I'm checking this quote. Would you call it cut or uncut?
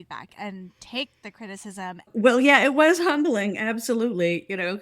cut